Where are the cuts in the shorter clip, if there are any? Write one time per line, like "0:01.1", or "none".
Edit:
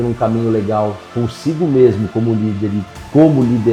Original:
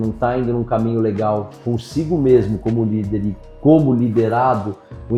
none